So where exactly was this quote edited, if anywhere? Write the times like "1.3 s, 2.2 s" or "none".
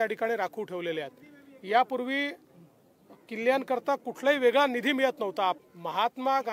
5.6 s